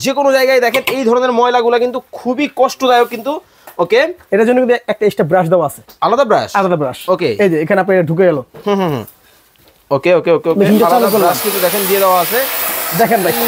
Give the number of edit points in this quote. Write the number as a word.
zero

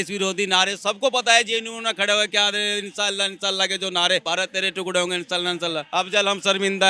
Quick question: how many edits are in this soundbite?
two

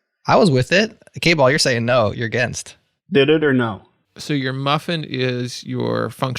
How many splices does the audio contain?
one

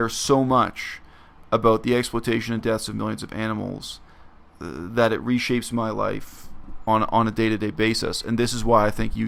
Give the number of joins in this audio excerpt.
zero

